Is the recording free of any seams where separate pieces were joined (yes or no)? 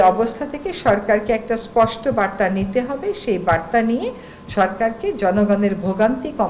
yes